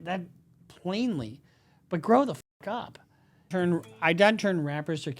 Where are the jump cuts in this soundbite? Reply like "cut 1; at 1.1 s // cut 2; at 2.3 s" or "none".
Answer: cut 1; at 3.5 s